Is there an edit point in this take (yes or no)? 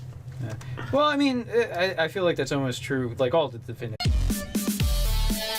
no